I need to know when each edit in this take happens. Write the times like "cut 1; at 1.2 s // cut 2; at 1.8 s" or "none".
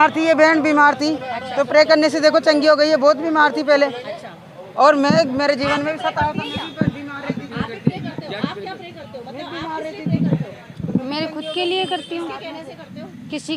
none